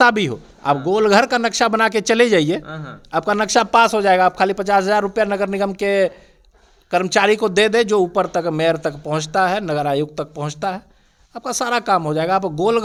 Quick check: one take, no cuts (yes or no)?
yes